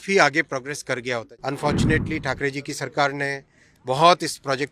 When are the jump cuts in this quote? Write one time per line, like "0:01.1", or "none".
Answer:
0:01.3